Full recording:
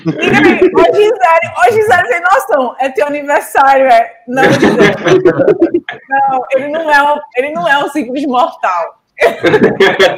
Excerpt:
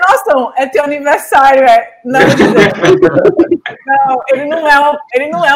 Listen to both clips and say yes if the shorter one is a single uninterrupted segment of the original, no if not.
yes